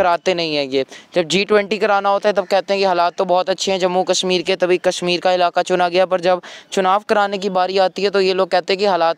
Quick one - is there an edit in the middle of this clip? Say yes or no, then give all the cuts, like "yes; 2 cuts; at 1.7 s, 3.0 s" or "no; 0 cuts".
no; 0 cuts